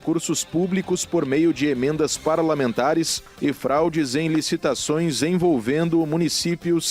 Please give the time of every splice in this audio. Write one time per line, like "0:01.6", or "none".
0:03.2